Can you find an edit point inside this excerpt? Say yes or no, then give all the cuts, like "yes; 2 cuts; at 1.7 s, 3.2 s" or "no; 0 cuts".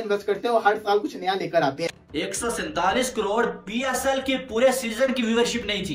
yes; 1 cut; at 1.9 s